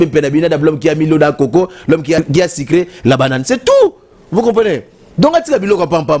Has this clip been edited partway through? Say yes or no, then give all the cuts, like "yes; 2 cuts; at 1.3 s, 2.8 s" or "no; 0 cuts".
yes; 1 cut; at 2.2 s